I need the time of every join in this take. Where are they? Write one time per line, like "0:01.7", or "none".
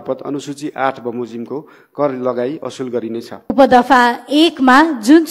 0:03.5